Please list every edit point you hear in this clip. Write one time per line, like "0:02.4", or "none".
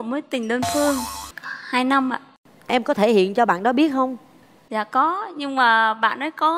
0:01.2